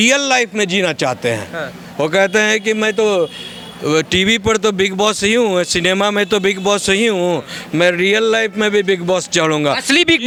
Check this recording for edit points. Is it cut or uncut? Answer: uncut